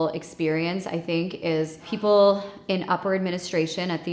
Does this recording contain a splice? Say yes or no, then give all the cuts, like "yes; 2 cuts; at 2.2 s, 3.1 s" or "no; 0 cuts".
yes; 1 cut; at 1.8 s